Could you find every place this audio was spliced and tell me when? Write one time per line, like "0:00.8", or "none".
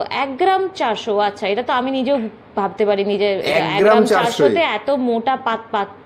none